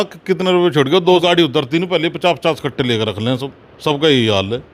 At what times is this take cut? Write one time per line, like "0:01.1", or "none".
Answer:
0:01.2